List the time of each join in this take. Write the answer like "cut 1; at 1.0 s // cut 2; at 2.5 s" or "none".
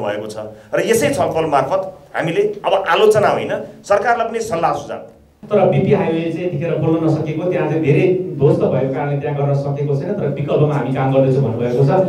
cut 1; at 5.3 s

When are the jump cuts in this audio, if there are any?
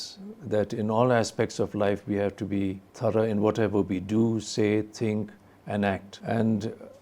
cut 1; at 2.9 s // cut 2; at 6.1 s

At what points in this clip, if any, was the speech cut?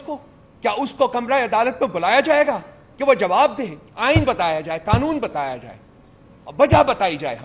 cut 1; at 3.8 s

